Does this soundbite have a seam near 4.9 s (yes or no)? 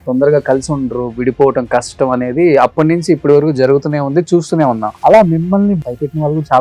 yes